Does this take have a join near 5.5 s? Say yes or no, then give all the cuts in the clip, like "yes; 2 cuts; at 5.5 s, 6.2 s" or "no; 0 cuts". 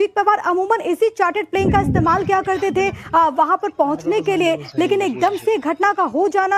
no; 0 cuts